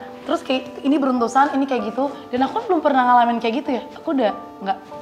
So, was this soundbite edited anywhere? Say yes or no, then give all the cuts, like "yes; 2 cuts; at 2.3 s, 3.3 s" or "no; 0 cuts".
no; 0 cuts